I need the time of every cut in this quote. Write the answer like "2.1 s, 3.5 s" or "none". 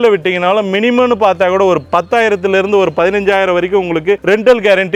none